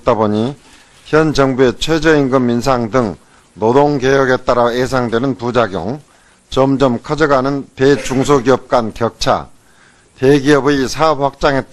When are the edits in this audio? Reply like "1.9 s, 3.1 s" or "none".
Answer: 4.2 s